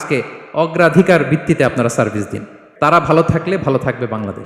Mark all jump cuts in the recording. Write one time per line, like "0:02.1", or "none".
0:02.9